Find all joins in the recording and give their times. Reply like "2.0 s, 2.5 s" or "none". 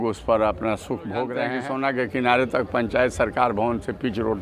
1.5 s

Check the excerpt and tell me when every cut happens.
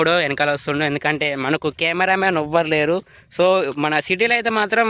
none

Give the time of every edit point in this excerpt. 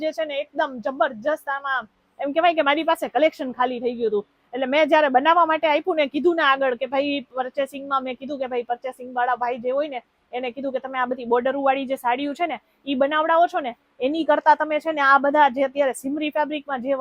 none

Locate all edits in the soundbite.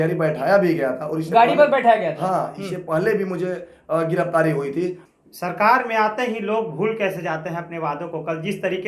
5.0 s

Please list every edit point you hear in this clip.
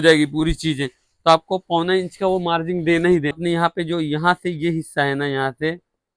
3.3 s

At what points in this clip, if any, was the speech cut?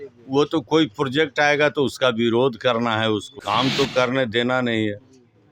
3.3 s

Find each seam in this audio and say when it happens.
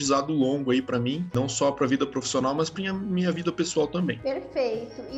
none

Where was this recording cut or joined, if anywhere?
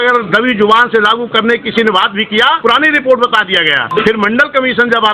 2.6 s, 3.8 s

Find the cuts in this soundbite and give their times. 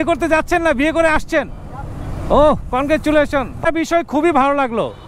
3.7 s

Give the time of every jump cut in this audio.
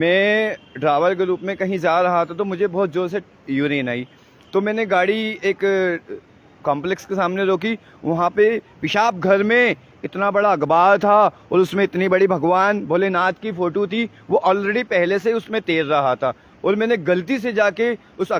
none

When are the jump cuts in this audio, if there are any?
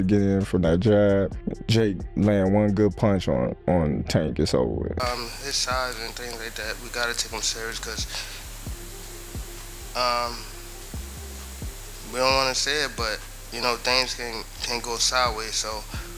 5.0 s

